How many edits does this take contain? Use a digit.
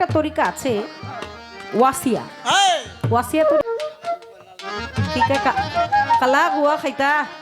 1